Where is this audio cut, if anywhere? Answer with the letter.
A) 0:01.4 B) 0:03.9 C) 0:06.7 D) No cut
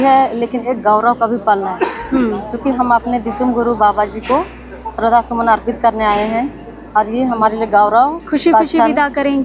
D